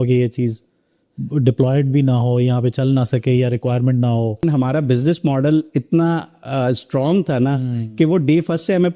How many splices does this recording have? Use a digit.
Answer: 1